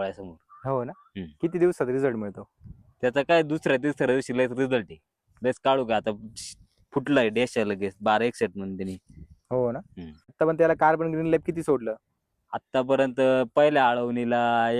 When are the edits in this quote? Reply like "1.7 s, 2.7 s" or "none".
10.3 s